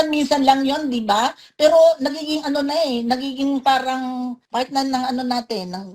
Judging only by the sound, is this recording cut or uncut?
cut